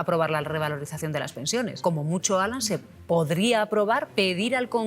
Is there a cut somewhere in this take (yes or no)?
yes